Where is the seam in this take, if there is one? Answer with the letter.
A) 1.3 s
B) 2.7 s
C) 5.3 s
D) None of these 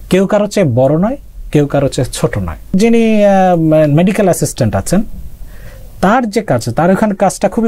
B